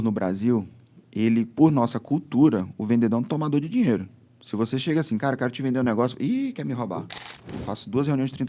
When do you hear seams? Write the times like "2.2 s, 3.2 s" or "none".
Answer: 7.5 s